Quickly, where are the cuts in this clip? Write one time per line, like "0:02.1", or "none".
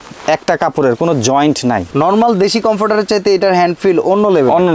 0:01.9